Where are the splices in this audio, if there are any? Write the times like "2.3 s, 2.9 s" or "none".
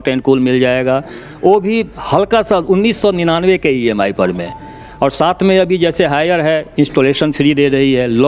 none